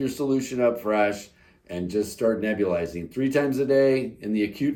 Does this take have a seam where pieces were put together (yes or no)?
no